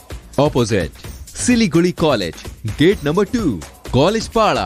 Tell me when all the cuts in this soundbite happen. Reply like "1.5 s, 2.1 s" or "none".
none